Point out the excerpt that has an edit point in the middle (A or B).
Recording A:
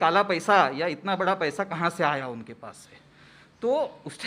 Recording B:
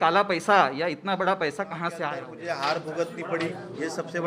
B